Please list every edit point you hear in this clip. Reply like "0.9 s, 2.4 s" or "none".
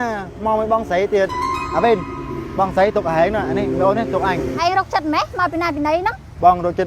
4.5 s